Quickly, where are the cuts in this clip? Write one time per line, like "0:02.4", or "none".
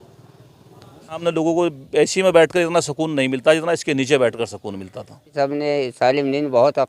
0:01.2
0:05.3